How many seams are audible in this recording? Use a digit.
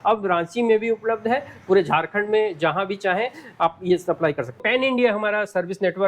1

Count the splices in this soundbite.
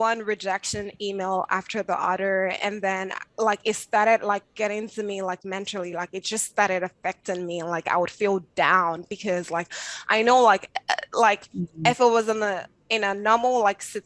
0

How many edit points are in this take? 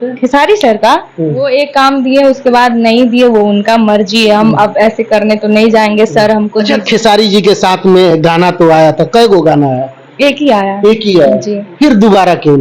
2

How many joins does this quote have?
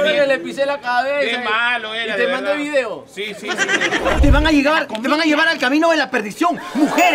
1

